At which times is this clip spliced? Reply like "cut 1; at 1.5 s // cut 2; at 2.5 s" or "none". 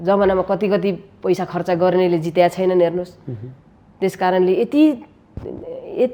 none